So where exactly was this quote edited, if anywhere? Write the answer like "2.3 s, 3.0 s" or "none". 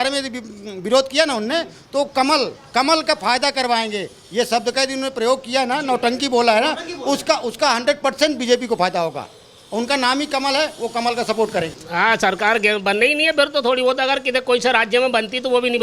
none